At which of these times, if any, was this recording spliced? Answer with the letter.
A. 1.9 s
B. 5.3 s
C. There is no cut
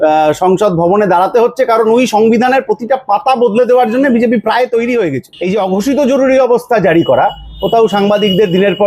B